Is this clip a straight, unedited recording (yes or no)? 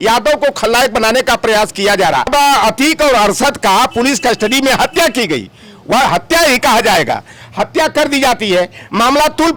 no